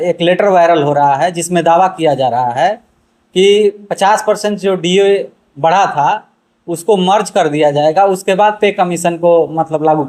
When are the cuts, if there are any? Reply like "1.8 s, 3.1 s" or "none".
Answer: none